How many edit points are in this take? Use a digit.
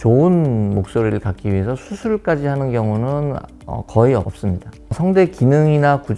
1